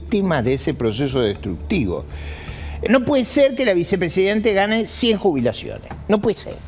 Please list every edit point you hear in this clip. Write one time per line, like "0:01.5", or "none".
0:02.8